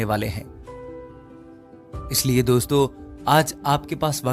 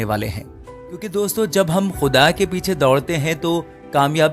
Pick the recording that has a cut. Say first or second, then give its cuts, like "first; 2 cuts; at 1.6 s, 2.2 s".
second; 1 cut; at 1.1 s